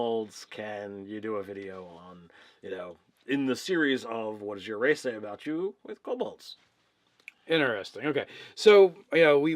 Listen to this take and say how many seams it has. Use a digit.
1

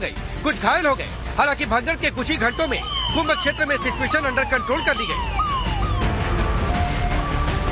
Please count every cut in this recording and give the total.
1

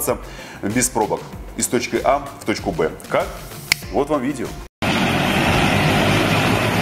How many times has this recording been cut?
0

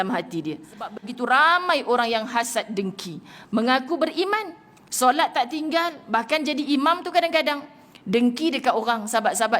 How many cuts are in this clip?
1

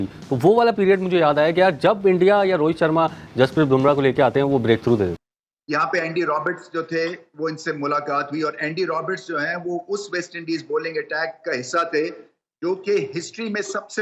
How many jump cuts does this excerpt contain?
1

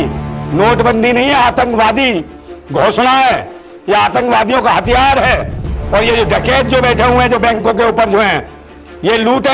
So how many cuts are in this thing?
0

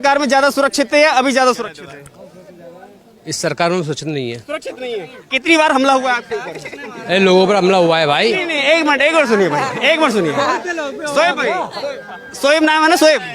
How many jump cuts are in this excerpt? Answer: 0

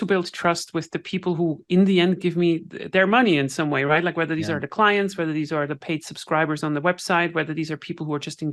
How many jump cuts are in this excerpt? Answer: 0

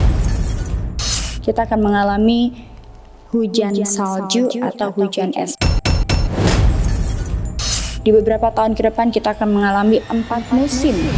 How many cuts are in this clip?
3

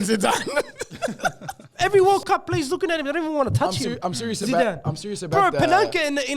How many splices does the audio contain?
1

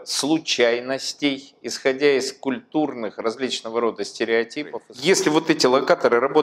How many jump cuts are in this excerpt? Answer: 1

